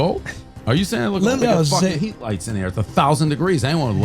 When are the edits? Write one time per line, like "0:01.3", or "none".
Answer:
0:01.4